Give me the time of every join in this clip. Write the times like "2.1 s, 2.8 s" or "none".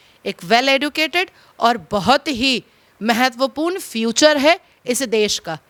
none